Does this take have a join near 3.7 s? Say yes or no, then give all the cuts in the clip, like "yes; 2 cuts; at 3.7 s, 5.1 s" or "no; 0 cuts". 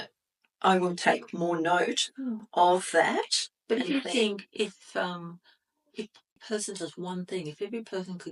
no; 1 cut; at 6.4 s